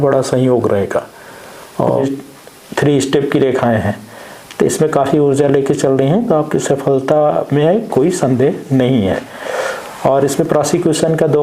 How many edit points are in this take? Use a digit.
1